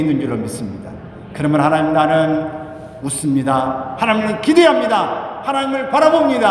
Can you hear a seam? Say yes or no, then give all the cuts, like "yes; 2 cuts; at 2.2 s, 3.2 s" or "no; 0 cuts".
no; 0 cuts